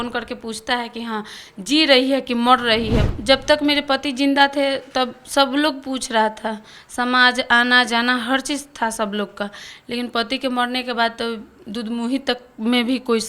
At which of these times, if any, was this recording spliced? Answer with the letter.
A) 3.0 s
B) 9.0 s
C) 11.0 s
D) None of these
A